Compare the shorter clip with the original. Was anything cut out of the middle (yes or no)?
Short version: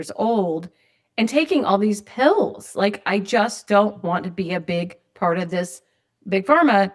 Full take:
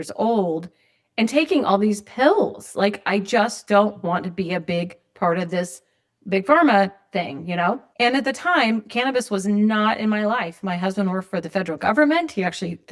no